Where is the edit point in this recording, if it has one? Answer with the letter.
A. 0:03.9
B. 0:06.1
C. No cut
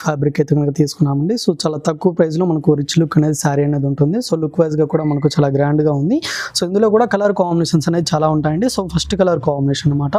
C